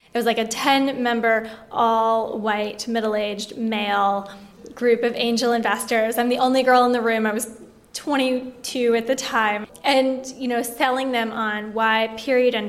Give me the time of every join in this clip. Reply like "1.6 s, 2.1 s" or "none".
9.6 s